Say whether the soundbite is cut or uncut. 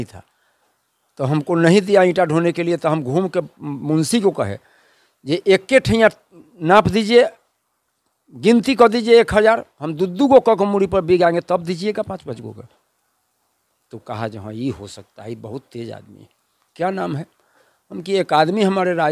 uncut